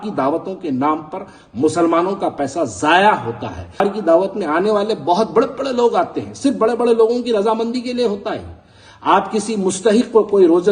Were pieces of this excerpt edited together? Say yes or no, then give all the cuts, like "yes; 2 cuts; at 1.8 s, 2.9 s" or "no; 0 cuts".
yes; 1 cut; at 3.8 s